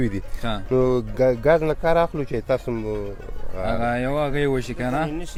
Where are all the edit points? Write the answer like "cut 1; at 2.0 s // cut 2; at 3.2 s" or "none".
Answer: none